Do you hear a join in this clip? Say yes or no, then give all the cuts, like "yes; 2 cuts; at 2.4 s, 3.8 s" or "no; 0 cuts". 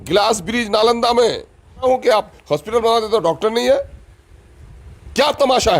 yes; 1 cut; at 1.8 s